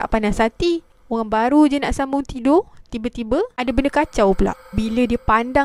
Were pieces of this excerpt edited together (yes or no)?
yes